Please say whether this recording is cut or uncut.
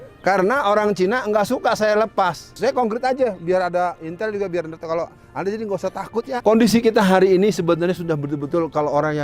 cut